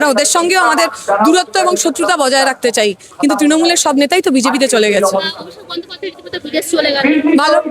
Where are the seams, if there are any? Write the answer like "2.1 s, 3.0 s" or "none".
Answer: none